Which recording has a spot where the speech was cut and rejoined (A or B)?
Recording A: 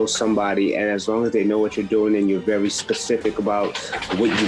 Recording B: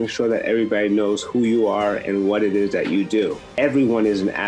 B